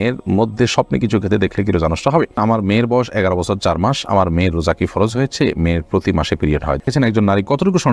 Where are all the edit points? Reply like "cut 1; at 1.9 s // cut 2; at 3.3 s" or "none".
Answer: cut 1; at 2.4 s // cut 2; at 6.8 s